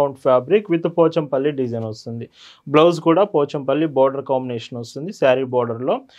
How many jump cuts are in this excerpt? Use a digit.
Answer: 0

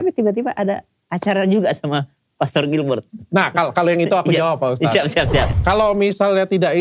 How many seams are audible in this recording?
1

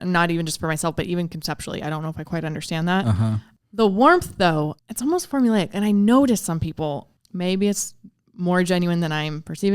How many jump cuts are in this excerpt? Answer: 3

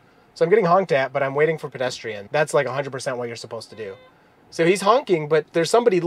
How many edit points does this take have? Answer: 1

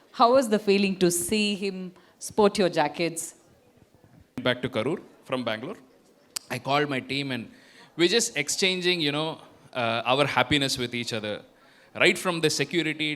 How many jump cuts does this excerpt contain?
1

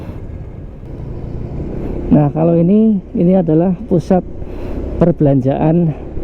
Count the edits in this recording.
1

